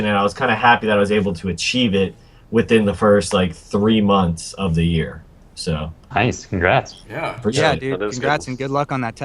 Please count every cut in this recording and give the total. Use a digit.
1